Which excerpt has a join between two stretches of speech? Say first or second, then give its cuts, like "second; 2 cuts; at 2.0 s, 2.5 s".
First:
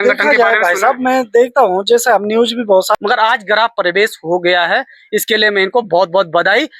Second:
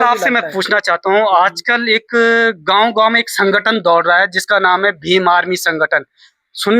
first; 1 cut; at 3.0 s